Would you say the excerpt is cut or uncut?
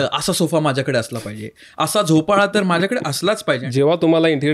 cut